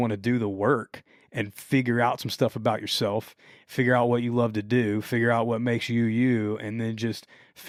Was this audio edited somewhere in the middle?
no; 0 cuts

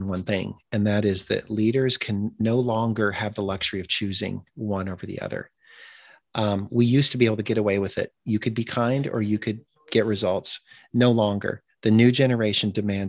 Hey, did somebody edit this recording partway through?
no; 0 cuts

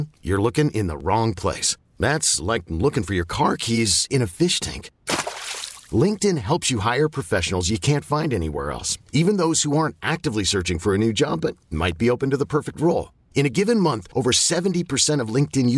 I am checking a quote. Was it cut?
no; 0 cuts

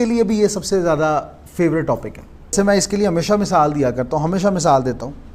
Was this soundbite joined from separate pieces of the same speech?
yes; 1 cut; at 2.5 s

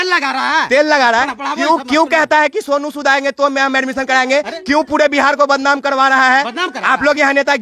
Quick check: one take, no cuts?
yes; 0 cuts

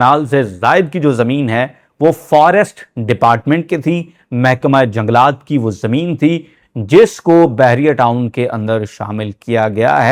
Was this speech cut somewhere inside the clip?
no; 0 cuts

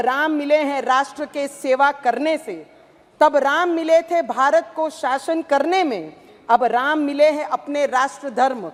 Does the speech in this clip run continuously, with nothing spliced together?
yes; 0 cuts

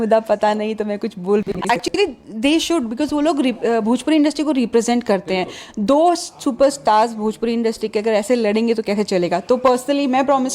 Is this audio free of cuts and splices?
no; 1 cut; at 1.7 s

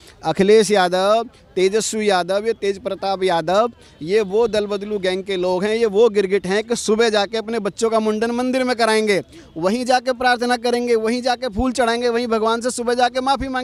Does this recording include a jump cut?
no; 0 cuts

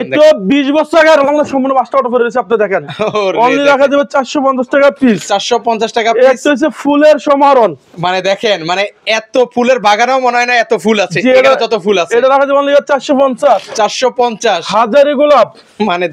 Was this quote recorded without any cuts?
yes; 0 cuts

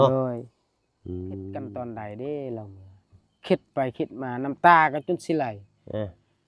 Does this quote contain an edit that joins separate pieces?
yes; 1 cut; at 1.7 s

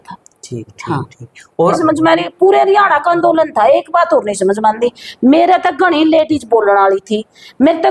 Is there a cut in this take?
yes; 1 cut; at 1.8 s

